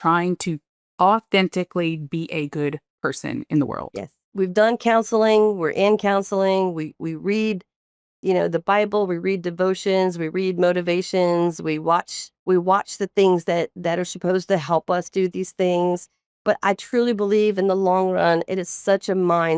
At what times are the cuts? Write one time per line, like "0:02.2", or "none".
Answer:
0:04.3
0:16.3